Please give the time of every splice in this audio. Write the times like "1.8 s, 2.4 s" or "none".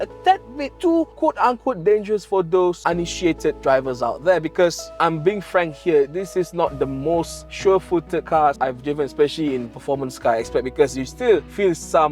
none